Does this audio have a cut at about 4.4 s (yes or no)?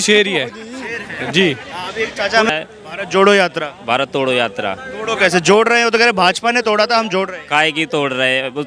no